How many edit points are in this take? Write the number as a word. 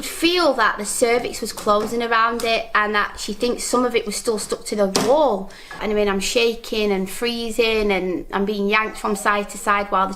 one